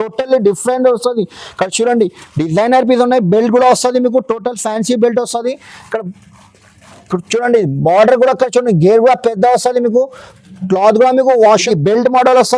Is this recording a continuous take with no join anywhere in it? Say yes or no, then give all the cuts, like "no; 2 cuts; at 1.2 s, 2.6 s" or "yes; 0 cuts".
no; 1 cut; at 11.6 s